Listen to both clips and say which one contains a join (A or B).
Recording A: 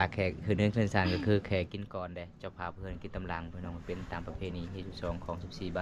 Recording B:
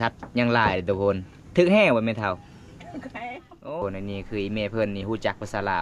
B